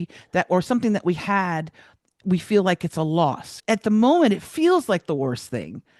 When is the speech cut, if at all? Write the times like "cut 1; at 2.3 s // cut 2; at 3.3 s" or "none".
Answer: cut 1; at 3.5 s